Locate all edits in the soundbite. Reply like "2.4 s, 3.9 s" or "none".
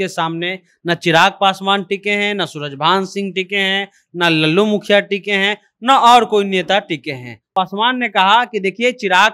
7.3 s